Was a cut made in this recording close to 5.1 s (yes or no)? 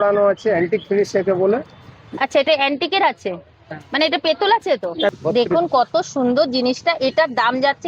yes